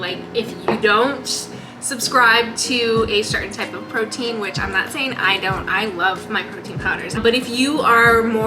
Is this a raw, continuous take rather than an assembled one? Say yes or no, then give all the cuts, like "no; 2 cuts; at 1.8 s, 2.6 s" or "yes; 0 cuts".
no; 1 cut; at 7.2 s